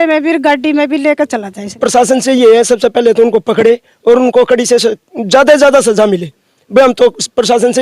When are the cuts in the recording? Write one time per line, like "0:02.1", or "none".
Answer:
0:01.7